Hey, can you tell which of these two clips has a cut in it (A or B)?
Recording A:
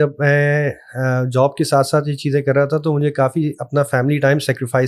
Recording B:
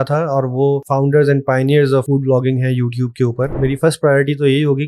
B